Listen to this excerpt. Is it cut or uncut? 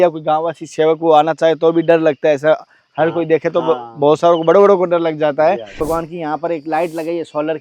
cut